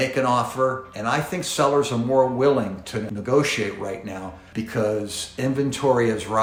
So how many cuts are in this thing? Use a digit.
0